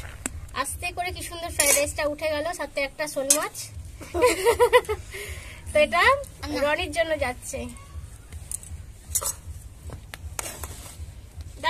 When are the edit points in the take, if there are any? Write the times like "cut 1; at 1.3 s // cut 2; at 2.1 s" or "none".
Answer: none